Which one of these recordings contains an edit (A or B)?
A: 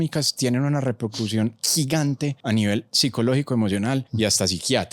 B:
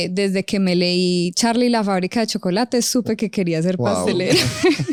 A